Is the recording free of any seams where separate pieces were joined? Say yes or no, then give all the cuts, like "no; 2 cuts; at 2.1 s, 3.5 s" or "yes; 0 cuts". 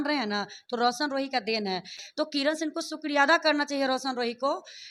yes; 0 cuts